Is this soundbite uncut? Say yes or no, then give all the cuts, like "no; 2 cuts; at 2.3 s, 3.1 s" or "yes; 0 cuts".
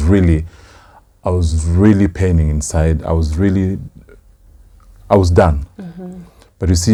yes; 0 cuts